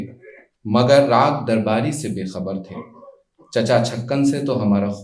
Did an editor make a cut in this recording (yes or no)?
no